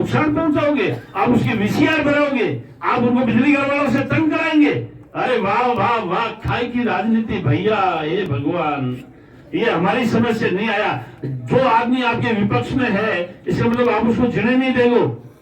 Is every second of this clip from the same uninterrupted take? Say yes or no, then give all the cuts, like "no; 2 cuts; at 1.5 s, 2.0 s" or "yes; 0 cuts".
yes; 0 cuts